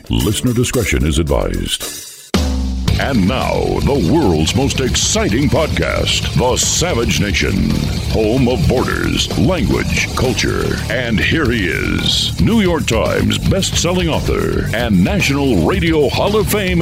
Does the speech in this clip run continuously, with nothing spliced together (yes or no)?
yes